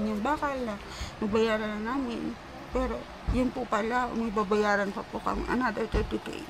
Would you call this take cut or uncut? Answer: uncut